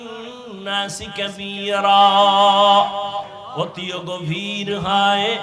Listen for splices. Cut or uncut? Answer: cut